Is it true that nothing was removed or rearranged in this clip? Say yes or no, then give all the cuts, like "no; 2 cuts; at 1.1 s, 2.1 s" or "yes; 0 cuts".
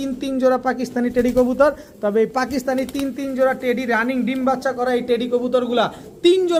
yes; 0 cuts